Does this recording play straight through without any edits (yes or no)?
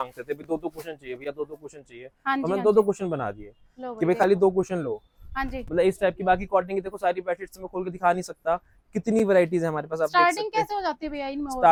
yes